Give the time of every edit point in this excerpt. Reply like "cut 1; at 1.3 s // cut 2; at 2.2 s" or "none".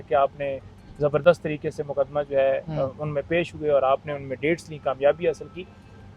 none